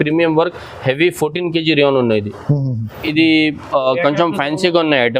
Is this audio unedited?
no; 1 cut; at 2.9 s

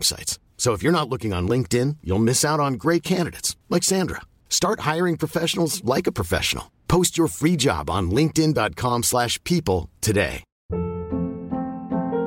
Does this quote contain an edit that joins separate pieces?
yes; 1 cut; at 10.6 s

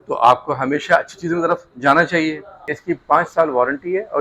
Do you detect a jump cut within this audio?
yes; 1 cut; at 2.7 s

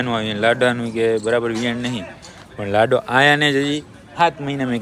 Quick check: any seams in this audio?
no; 0 cuts

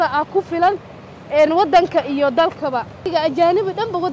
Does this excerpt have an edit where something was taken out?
yes; 1 cut; at 3.1 s

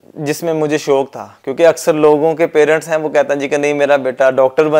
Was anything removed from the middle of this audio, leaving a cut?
no; 0 cuts

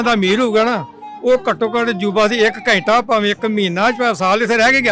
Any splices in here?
no; 0 cuts

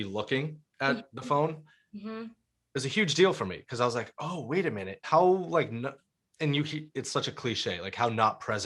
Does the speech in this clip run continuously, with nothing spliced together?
no; 1 cut; at 4.9 s

